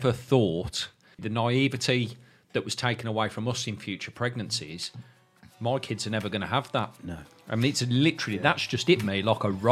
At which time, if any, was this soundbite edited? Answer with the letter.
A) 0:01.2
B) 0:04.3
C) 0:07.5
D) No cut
A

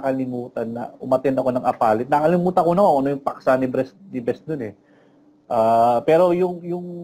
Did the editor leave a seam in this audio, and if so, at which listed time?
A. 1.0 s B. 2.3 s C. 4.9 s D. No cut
D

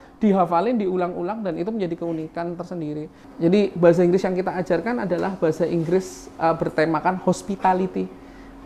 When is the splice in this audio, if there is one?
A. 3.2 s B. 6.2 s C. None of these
A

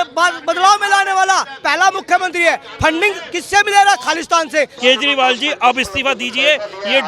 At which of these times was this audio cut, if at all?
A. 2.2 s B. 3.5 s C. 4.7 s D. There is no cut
C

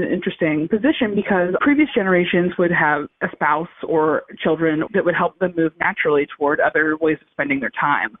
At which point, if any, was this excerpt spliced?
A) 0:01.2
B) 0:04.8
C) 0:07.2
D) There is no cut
B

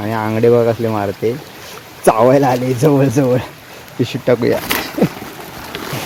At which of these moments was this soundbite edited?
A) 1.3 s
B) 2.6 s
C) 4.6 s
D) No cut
D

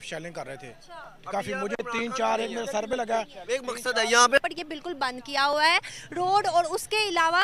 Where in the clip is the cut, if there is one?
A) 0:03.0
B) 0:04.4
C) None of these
B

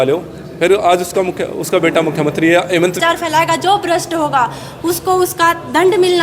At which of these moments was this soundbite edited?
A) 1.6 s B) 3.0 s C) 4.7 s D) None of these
B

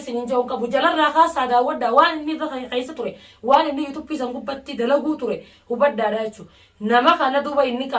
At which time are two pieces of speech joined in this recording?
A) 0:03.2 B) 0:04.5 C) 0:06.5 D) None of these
D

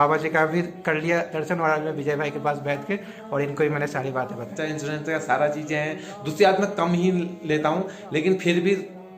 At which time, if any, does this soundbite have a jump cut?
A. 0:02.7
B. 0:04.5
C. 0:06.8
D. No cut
B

